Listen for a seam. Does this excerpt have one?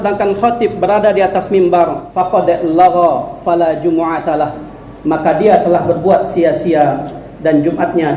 yes; 1 cut; at 2.1 s

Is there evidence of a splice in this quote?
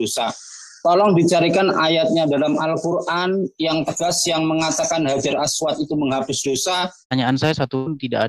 yes; 1 cut; at 7.1 s

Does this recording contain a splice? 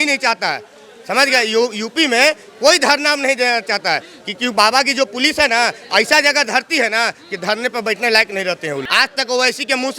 yes; 1 cut; at 8.9 s

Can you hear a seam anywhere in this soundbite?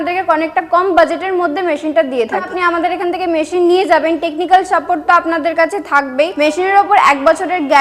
yes; 2 cuts; at 2.5 s, 6.3 s

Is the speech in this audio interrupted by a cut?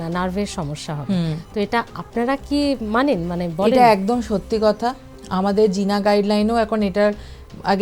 no; 0 cuts

